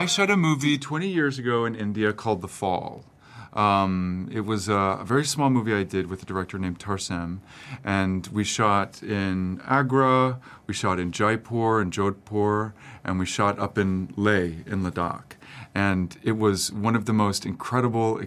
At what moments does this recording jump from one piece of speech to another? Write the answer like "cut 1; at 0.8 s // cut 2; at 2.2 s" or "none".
none

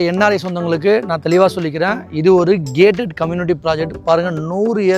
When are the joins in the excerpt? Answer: none

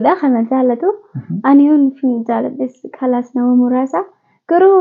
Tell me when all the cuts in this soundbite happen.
none

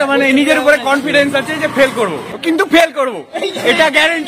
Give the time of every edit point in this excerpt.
cut 1; at 2.3 s

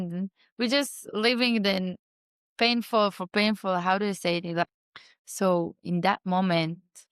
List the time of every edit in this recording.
cut 1; at 4.6 s

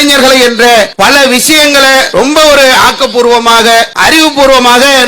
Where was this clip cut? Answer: cut 1; at 0.9 s // cut 2; at 2.1 s // cut 3; at 3.9 s

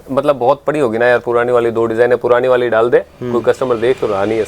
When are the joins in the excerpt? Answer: none

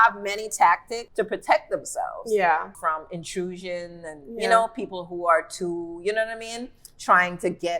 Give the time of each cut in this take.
cut 1; at 1.0 s // cut 2; at 2.7 s

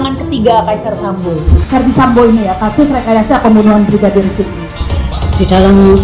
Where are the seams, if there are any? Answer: cut 1; at 1.6 s // cut 2; at 4.6 s

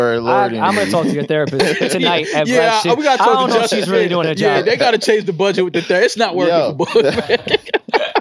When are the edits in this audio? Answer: none

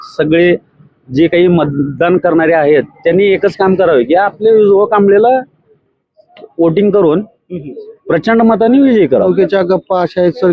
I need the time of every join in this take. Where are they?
cut 1; at 9.3 s

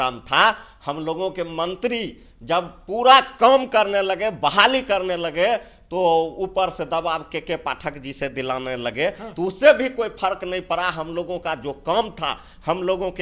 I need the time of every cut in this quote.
none

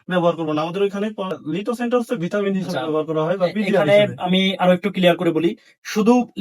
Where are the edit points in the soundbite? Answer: cut 1; at 1.3 s

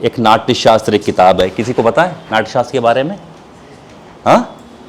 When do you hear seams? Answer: none

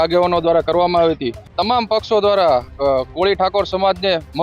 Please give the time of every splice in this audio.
cut 1; at 1.5 s

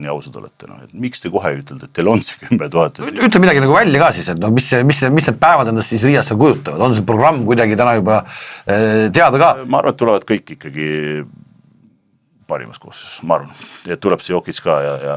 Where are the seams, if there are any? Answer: cut 1; at 3.1 s // cut 2; at 9.6 s

